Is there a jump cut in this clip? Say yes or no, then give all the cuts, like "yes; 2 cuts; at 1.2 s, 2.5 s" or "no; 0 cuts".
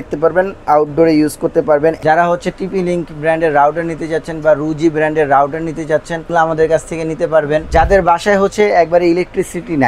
yes; 3 cuts; at 2.0 s, 6.3 s, 7.7 s